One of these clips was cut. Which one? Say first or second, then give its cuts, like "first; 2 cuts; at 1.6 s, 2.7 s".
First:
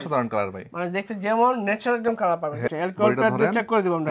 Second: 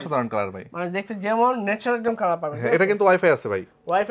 first; 1 cut; at 2.7 s